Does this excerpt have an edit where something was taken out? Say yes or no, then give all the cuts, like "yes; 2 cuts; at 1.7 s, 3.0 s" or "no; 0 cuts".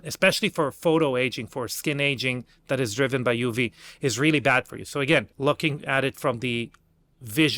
yes; 1 cut; at 5.3 s